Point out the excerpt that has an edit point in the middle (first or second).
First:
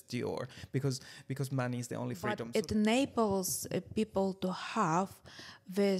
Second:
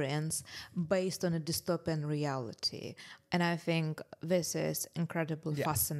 first